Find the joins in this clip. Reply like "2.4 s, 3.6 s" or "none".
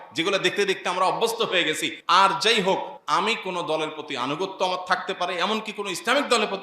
1.9 s, 2.9 s